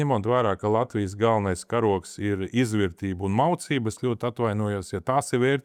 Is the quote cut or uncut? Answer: uncut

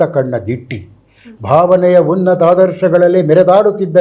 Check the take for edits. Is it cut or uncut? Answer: uncut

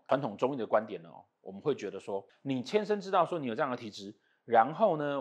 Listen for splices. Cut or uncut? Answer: cut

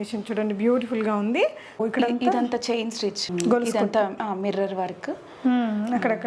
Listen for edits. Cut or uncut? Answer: cut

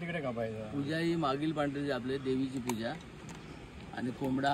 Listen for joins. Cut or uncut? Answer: uncut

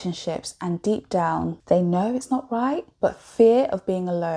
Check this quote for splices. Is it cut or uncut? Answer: cut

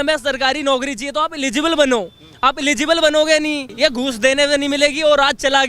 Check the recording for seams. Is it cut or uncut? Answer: cut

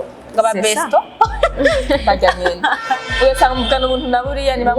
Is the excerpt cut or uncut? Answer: uncut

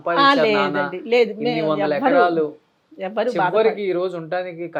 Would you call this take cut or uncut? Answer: uncut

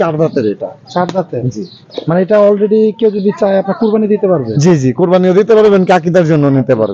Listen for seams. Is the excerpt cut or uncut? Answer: uncut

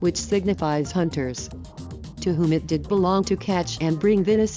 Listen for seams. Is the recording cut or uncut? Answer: uncut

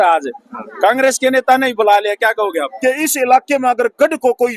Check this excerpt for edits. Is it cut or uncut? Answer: cut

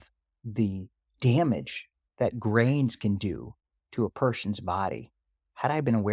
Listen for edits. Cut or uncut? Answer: uncut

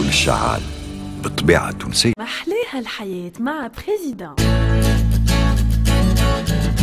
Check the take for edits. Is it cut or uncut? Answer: uncut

